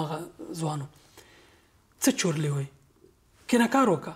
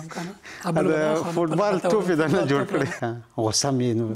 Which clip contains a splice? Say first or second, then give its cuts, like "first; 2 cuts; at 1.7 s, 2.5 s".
second; 1 cut; at 3.0 s